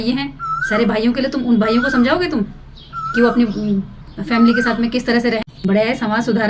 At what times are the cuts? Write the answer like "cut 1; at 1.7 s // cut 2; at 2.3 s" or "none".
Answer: cut 1; at 5.4 s